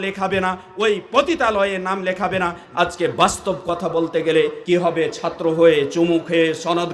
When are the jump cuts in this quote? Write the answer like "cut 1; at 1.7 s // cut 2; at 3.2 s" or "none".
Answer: cut 1; at 2.6 s // cut 2; at 4.6 s